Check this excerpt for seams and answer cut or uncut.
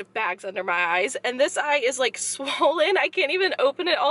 uncut